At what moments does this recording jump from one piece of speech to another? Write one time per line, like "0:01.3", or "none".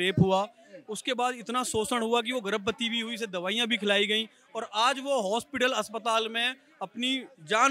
none